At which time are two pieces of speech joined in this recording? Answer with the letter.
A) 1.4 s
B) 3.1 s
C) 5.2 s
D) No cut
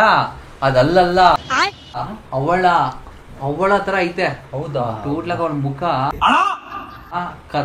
D